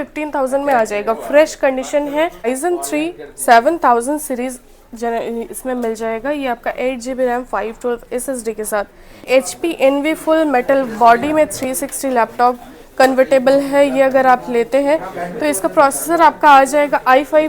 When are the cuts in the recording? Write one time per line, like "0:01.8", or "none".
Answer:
0:02.5
0:09.2